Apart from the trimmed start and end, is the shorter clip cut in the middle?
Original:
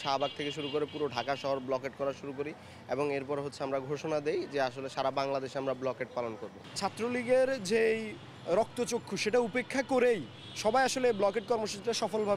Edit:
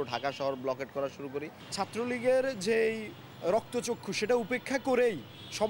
yes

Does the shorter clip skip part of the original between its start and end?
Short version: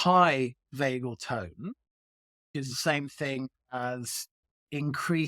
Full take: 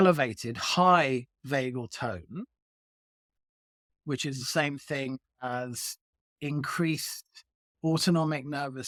yes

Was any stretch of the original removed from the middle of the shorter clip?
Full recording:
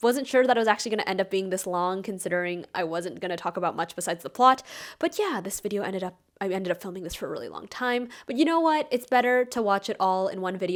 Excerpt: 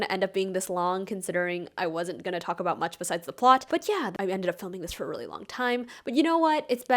yes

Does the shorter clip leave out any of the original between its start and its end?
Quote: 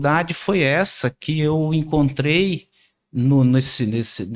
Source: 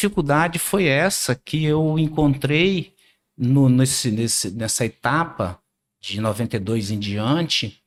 no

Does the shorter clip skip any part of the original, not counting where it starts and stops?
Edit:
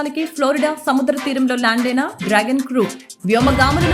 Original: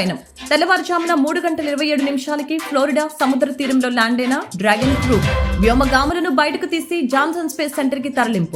no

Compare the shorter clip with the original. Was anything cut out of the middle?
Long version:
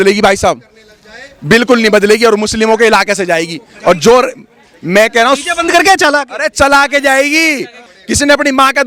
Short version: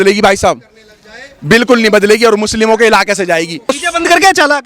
yes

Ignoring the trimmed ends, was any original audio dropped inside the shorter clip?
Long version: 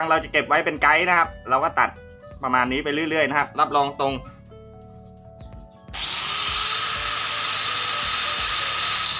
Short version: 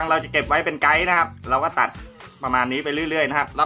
no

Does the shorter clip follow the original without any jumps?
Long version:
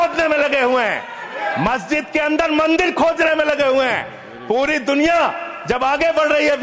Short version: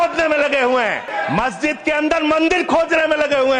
no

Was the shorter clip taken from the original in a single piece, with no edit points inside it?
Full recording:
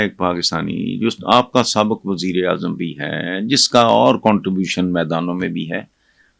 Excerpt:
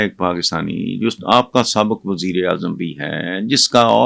yes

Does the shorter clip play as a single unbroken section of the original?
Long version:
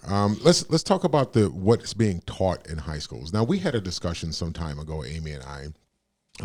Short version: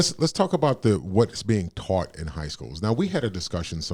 yes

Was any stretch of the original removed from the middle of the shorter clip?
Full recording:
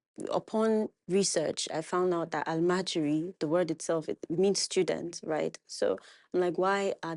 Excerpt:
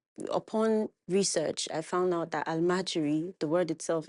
no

